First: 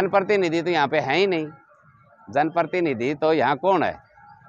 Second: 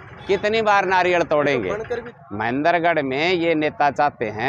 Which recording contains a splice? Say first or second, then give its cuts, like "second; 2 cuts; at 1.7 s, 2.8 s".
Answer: second; 1 cut; at 2.1 s